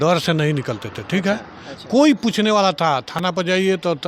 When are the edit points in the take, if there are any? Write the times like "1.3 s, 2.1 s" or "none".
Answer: none